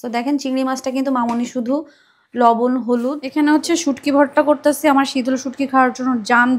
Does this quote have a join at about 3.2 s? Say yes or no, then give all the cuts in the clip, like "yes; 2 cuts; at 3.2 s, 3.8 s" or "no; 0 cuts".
yes; 1 cut; at 3.2 s